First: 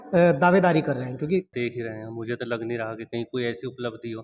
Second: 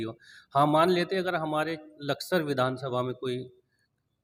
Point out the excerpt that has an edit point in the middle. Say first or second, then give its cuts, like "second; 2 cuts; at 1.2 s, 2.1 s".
first; 1 cut; at 1.5 s